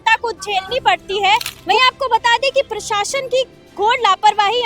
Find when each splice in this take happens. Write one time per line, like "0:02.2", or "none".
0:01.6